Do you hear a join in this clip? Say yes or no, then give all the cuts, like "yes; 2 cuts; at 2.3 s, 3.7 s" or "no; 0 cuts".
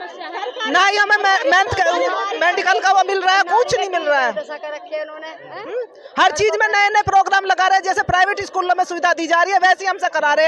no; 0 cuts